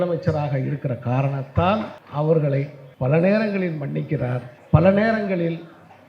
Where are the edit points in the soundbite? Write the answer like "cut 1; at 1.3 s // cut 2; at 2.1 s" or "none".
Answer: cut 1; at 2.0 s // cut 2; at 2.8 s // cut 3; at 4.5 s